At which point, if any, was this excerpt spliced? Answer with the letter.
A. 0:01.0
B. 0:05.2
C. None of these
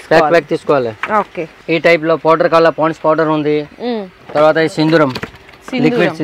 C